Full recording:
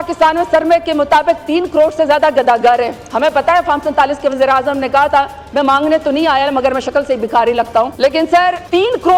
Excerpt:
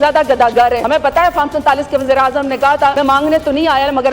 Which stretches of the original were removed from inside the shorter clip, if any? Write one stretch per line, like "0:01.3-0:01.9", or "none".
0:02.9-0:03.1
0:05.3-0:05.5